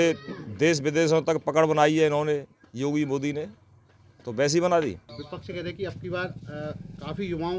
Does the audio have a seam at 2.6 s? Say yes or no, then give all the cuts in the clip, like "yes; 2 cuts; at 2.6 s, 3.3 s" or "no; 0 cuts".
no; 1 cut; at 5.1 s